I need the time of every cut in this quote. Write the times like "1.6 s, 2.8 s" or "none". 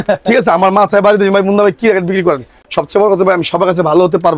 none